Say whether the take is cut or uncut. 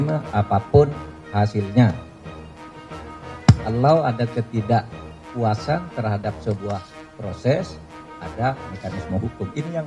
uncut